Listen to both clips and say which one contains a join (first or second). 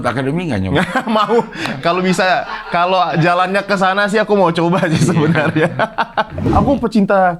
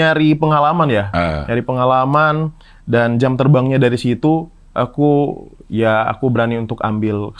first